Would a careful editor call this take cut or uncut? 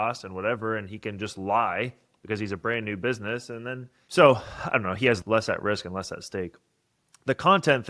uncut